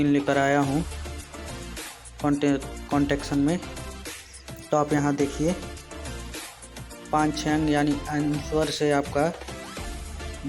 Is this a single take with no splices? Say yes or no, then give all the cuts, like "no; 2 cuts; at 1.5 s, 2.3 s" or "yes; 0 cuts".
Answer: no; 4 cuts; at 0.8 s, 2.2 s, 5.6 s, 7.1 s